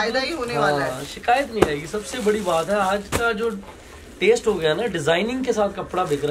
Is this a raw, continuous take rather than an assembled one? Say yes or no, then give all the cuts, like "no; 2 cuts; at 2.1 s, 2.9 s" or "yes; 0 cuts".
yes; 0 cuts